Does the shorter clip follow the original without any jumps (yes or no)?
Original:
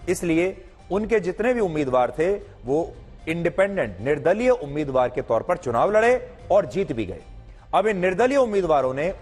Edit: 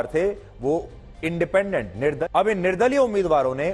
no